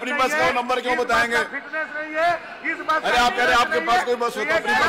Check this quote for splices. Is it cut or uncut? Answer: uncut